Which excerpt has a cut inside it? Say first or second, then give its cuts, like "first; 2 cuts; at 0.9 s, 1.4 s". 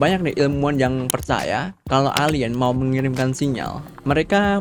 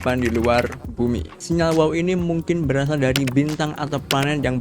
second; 1 cut; at 1.3 s